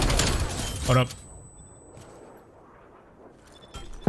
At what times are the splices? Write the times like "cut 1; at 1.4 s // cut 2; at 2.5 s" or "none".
none